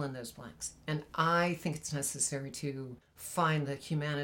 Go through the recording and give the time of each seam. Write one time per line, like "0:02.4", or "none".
none